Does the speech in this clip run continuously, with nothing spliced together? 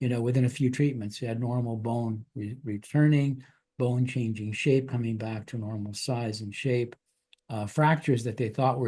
yes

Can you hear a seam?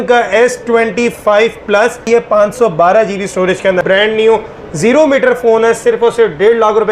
yes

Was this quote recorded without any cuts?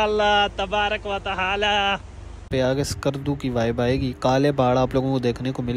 no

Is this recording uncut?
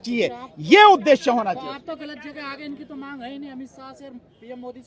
yes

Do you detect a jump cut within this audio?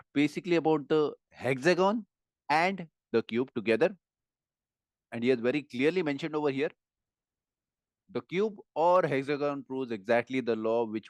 no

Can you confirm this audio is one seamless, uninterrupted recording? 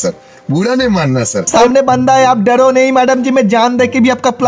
no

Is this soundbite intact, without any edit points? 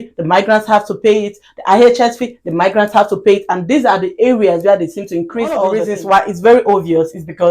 no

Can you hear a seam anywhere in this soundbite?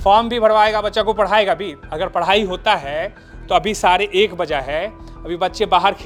no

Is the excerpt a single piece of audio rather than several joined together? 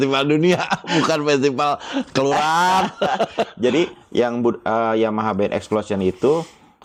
yes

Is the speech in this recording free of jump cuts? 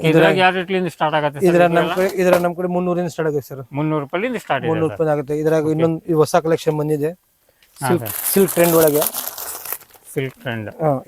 yes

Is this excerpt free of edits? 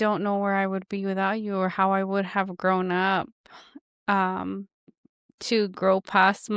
yes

